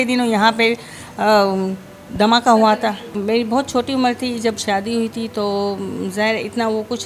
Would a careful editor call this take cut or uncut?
cut